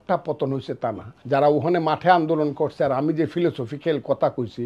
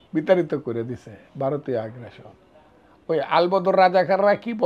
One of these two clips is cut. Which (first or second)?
first